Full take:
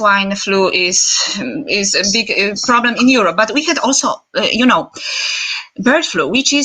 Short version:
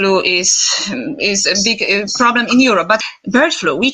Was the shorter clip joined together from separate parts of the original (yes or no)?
yes